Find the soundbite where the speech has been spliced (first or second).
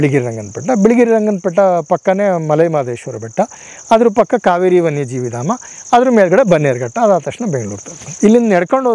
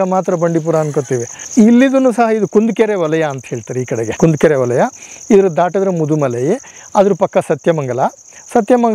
second